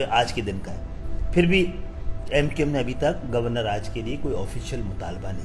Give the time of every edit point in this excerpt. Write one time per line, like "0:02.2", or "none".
none